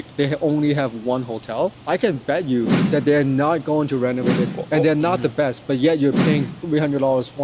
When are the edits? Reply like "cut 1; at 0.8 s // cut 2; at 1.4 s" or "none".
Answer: cut 1; at 1.8 s // cut 2; at 4.4 s